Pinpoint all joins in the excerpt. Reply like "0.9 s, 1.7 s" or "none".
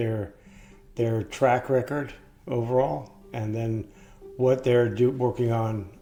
none

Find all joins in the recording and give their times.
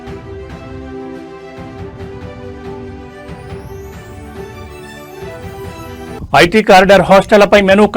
6.1 s

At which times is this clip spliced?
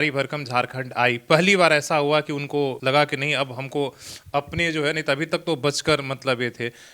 none

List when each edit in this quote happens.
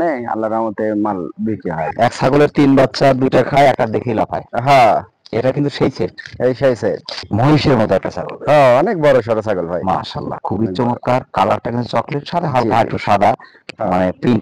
1.9 s, 7.2 s

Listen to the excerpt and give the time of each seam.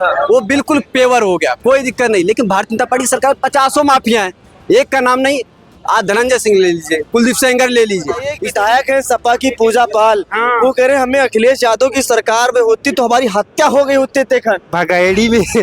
8.4 s

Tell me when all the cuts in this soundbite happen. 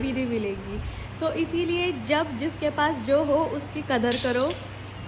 none

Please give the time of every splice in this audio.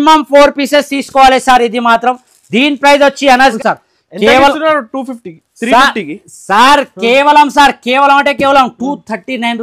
3.5 s

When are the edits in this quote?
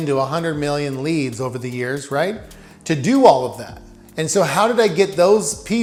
none

